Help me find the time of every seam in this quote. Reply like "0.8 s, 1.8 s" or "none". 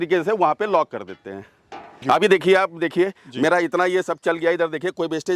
2.0 s